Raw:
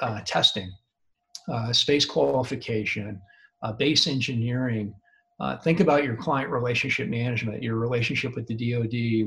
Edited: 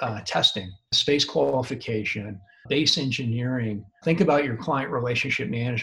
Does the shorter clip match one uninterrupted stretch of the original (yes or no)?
no